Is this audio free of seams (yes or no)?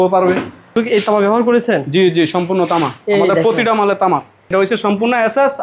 no